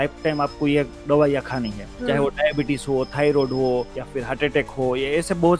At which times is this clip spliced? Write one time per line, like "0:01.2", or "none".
0:01.9
0:04.0